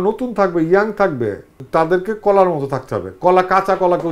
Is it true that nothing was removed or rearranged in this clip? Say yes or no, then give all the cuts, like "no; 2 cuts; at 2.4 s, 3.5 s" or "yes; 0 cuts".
no; 1 cut; at 1.6 s